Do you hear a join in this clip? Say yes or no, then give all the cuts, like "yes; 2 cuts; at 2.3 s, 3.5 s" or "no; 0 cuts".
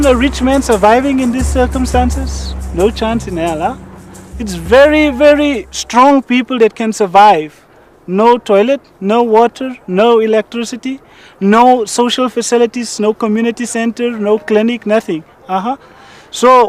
no; 0 cuts